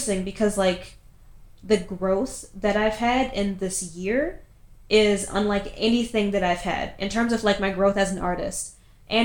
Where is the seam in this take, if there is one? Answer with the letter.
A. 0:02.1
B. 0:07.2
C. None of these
C